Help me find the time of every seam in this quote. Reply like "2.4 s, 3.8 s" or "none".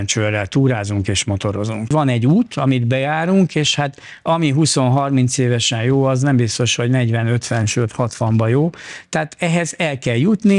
1.9 s